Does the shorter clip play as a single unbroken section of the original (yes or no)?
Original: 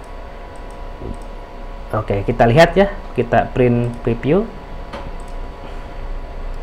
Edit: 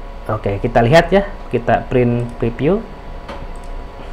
yes